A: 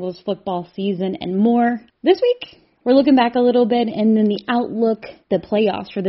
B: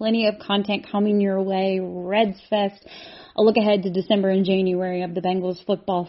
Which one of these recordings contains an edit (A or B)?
A